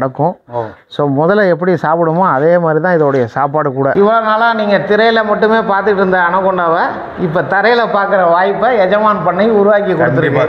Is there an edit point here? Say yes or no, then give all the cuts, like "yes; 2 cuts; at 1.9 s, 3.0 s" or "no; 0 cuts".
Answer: yes; 1 cut; at 3.9 s